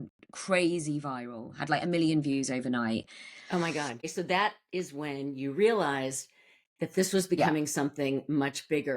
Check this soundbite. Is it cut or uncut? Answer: uncut